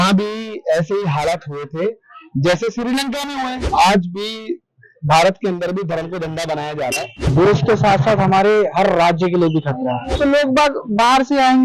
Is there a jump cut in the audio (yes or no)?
yes